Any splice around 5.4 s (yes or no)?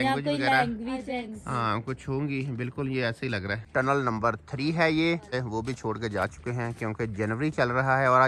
yes